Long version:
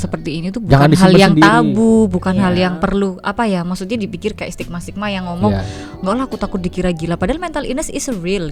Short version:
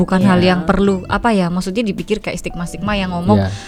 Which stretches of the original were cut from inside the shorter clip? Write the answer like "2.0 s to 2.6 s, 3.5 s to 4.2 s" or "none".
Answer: none